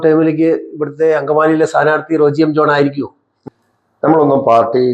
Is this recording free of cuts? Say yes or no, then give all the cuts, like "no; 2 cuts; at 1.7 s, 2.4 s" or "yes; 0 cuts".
no; 1 cut; at 3.4 s